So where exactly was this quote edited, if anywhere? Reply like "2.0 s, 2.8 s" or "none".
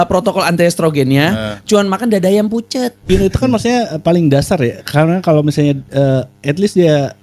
3.1 s